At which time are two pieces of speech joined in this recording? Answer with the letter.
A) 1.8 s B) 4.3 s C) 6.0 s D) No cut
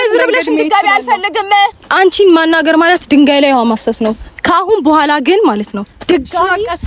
A